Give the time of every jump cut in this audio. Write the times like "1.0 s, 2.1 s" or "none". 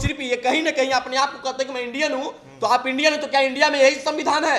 none